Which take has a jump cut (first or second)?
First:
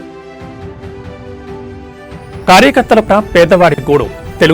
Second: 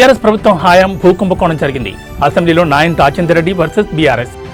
first